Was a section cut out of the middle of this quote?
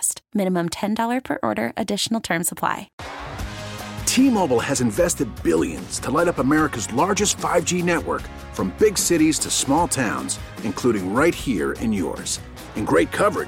yes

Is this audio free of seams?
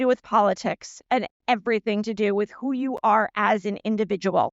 yes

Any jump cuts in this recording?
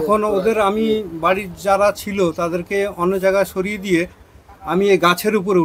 no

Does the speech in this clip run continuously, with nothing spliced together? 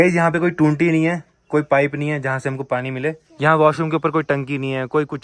no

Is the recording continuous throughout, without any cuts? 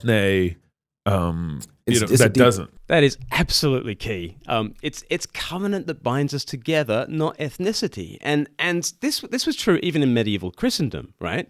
yes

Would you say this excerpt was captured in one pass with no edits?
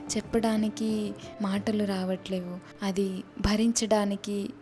yes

